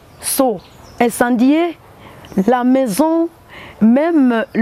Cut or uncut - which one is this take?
uncut